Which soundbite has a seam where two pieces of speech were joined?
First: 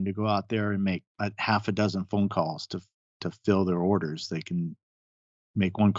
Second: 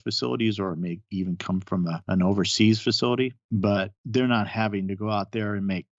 second; 2 cuts; at 2.0 s, 3.4 s

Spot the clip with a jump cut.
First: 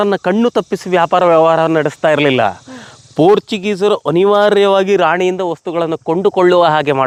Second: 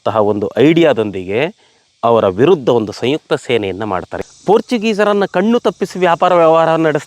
second; 1 cut; at 4.1 s

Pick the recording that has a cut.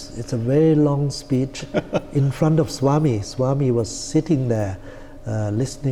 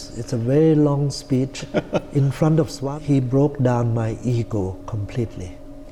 second; 1 cut; at 2.8 s

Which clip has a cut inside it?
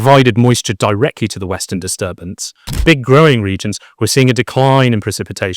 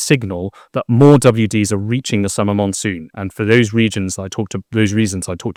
first; 1 cut; at 2.7 s

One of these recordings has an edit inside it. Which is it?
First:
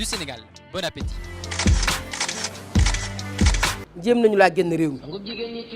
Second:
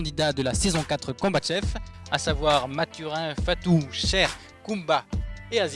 first; 1 cut; at 3.9 s

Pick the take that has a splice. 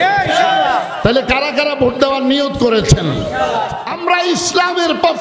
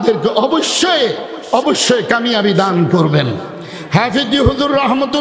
first; 1 cut; at 3.7 s

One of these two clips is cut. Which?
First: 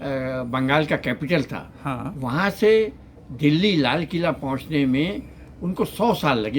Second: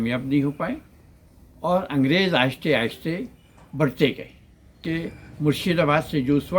second; 1 cut; at 4.8 s

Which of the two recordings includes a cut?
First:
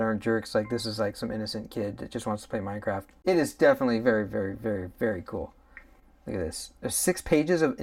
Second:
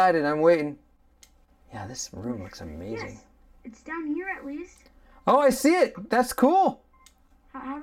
first; 1 cut; at 3.1 s

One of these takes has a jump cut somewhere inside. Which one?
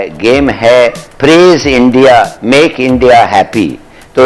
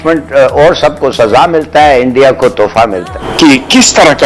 second; 1 cut; at 3.0 s

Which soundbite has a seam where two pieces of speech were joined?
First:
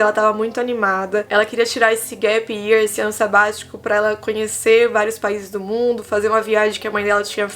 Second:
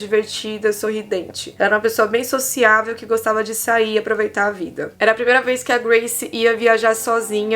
second; 2 cuts; at 1.4 s, 4.9 s

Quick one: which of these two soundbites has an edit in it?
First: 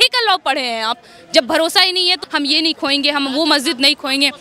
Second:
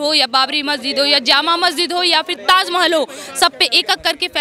first; 1 cut; at 2.2 s

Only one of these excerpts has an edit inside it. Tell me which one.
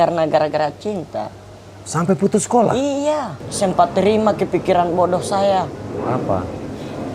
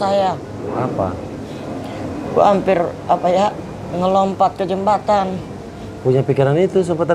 first; 1 cut; at 3.4 s

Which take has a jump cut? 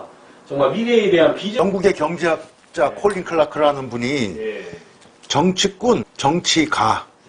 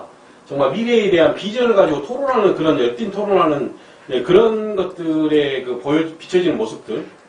first; 2 cuts; at 1.6 s, 6.1 s

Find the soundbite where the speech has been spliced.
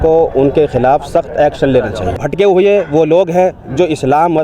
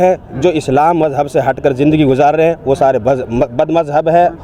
first; 1 cut; at 2.2 s

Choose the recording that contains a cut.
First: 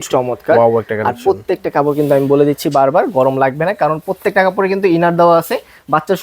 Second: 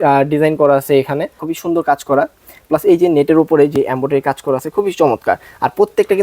second; 1 cut; at 1.4 s

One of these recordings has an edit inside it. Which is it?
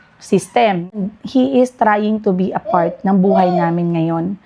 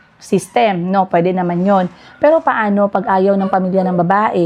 first; 1 cut; at 1.0 s

